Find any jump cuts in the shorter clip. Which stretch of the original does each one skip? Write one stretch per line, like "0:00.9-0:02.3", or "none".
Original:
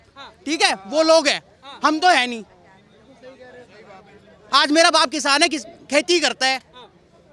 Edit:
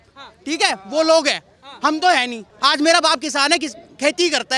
0:02.4-0:04.3